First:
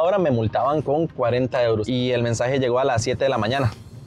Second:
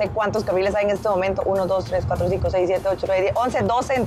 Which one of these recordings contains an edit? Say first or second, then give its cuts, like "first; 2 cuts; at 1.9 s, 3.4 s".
first; 1 cut; at 1.8 s